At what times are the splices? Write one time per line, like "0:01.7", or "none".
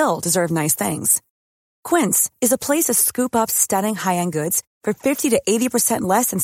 none